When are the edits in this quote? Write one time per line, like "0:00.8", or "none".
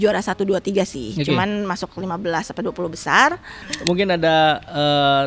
0:03.7